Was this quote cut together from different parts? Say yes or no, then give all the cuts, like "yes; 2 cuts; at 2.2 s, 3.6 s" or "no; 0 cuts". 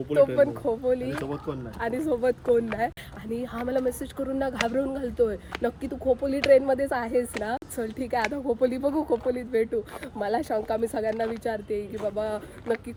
no; 0 cuts